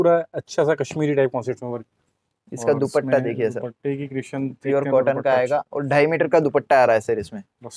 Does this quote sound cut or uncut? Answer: uncut